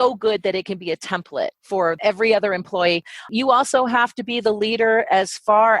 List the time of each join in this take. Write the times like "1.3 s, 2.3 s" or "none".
1.6 s, 3.1 s